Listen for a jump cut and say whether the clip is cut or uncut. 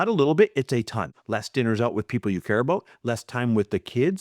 cut